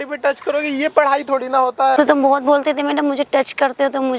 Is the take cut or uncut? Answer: cut